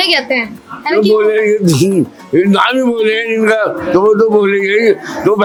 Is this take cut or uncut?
uncut